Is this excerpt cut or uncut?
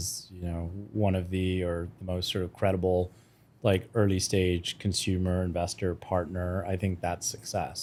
uncut